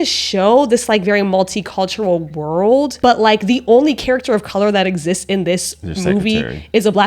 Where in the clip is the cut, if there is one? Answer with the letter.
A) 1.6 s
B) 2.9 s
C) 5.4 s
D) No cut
B